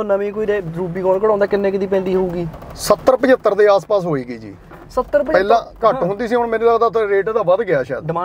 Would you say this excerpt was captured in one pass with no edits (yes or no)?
yes